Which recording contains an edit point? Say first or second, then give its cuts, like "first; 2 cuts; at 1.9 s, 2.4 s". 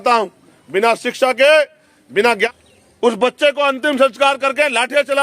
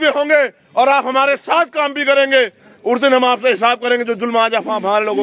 first; 1 cut; at 2.5 s